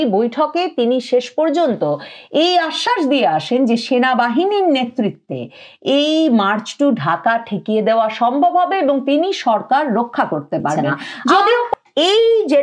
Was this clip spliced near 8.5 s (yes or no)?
no